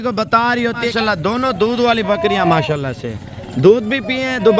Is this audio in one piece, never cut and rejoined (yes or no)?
no